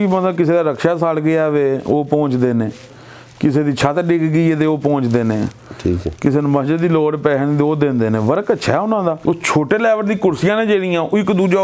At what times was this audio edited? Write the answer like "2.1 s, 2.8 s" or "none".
9.2 s